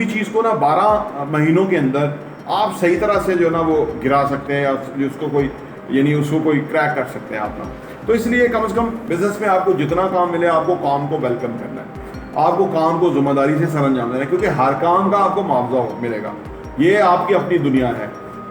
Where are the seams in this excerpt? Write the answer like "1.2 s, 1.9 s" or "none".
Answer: 9.0 s